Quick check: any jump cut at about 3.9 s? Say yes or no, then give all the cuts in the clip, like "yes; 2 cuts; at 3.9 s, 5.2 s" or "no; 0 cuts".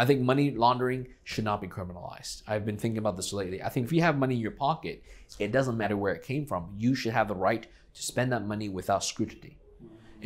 yes; 2 cuts; at 3.9 s, 5.8 s